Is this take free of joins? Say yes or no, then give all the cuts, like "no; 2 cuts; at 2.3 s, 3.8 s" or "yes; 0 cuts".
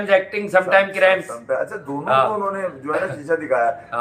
yes; 0 cuts